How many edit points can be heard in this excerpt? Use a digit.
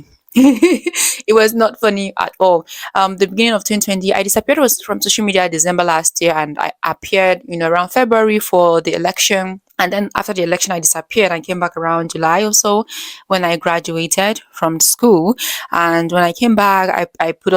1